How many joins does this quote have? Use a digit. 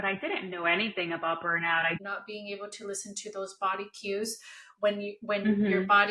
1